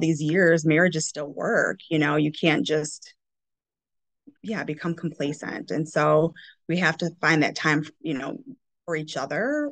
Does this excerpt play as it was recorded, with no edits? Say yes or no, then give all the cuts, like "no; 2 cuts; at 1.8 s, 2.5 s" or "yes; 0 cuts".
yes; 0 cuts